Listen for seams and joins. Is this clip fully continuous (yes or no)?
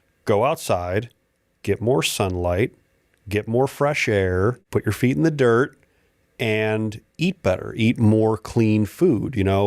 no